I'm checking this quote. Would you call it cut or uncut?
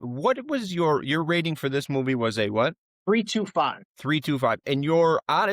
cut